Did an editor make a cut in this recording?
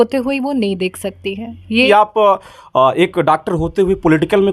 yes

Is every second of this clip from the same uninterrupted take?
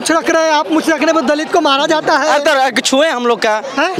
yes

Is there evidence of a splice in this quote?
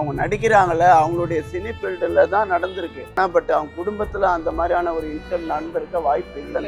yes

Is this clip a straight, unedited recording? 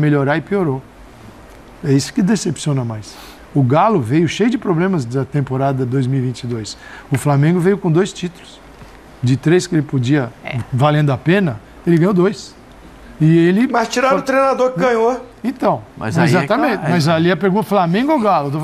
yes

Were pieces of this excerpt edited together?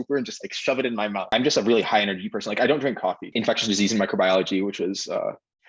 yes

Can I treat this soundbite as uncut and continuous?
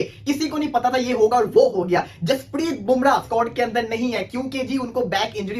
no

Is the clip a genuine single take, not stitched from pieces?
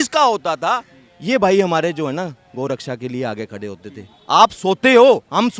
yes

